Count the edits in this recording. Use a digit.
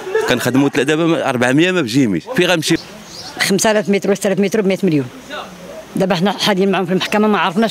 1